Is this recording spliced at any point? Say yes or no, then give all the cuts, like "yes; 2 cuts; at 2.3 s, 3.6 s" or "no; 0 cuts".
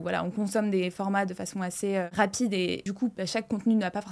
yes; 2 cuts; at 2.1 s, 3.0 s